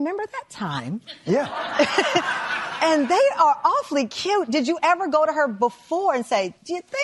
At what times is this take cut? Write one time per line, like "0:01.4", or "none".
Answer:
none